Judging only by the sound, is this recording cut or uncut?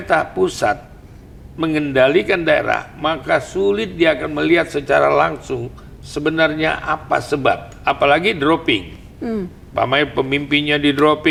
uncut